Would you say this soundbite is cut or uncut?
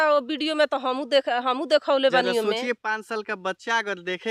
uncut